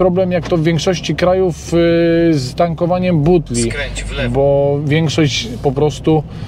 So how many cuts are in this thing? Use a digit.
0